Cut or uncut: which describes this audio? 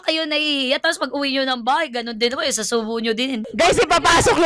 cut